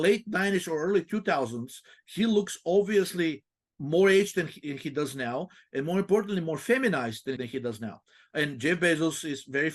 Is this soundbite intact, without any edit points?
no; 1 cut; at 7.4 s

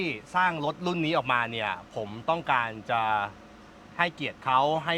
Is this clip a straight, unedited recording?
yes; 0 cuts

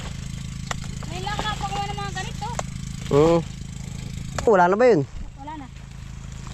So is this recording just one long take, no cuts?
no; 1 cut; at 4.5 s

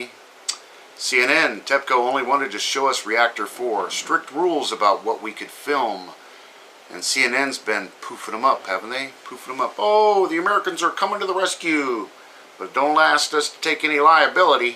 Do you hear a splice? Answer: yes; 1 cut; at 3.4 s

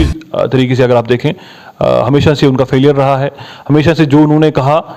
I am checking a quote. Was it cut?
no; 0 cuts

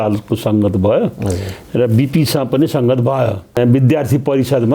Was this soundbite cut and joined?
yes; 1 cut; at 3.6 s

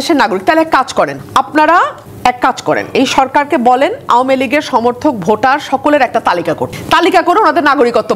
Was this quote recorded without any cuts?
no; 3 cuts; at 1.2 s, 2.0 s, 6.7 s

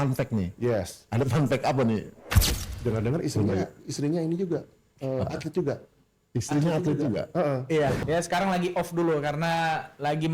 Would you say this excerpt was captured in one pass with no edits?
no; 1 cut; at 8.0 s

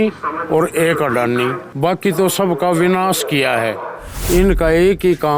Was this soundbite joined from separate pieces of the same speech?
yes; 2 cuts; at 1.6 s, 4.1 s

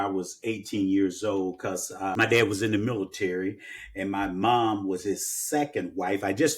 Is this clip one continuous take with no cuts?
no; 1 cut; at 2.1 s

